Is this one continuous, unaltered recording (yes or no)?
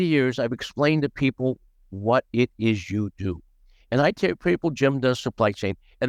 yes